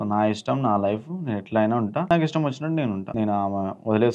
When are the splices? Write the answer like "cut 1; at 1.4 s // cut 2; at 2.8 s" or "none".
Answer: cut 1; at 2.0 s // cut 2; at 3.0 s